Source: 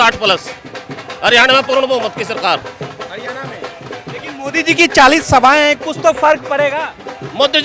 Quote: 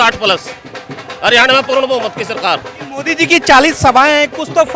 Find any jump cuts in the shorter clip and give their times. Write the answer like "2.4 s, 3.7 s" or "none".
2.8 s

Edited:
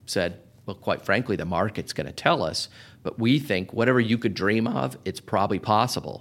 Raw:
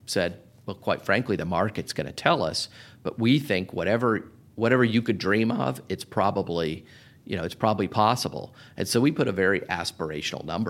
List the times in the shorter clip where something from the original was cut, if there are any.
3.7 s, 5.5 s

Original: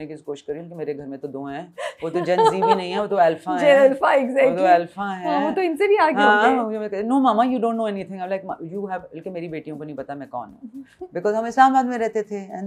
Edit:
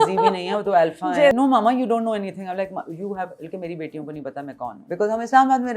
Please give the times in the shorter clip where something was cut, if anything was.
1.3 s, 4.8 s

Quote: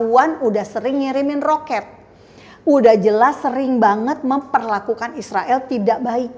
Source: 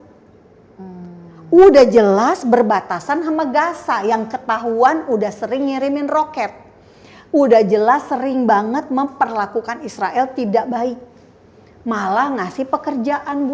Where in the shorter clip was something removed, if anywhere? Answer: none

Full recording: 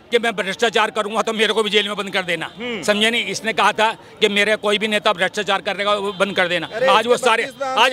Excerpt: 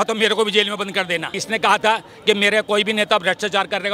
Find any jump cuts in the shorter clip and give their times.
1.3 s

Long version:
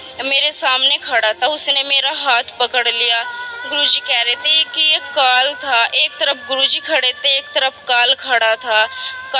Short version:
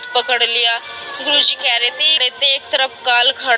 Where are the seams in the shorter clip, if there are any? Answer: 2.3 s

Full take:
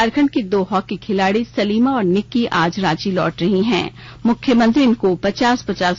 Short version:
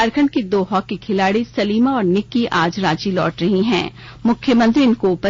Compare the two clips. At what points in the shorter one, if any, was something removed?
none

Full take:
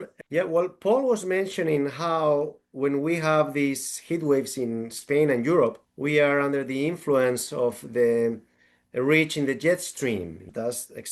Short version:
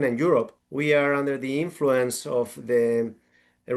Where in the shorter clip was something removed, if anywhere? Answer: none

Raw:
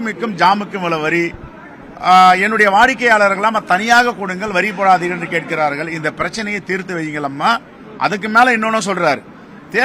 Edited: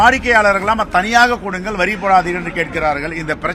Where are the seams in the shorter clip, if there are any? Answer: none

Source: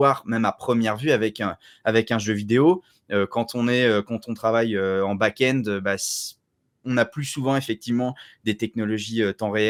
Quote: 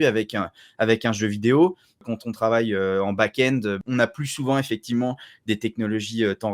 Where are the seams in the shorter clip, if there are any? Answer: 2.0 s, 3.8 s

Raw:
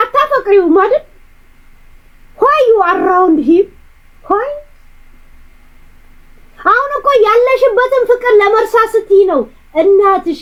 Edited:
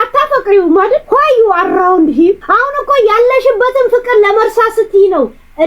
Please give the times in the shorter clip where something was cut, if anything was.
1.0 s, 2.4 s

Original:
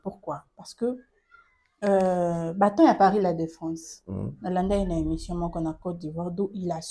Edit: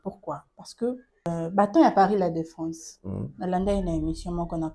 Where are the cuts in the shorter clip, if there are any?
1.3 s

